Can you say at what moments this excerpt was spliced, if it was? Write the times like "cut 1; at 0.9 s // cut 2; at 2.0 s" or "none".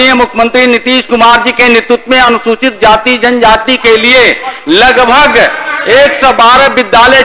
none